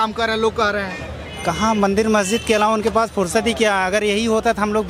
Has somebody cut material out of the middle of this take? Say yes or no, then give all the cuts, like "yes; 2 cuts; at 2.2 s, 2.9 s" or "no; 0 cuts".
no; 0 cuts